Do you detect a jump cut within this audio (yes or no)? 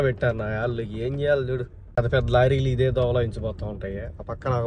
no